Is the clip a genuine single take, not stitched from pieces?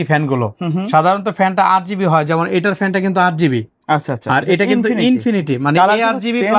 yes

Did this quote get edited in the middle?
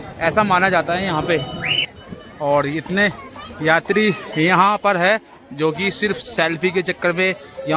yes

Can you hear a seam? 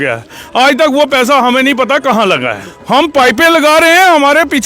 yes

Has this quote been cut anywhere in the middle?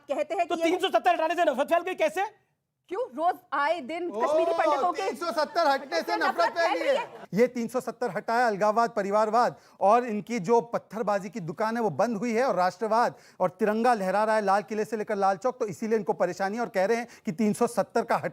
yes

